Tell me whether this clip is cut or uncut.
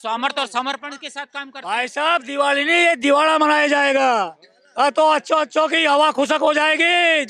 uncut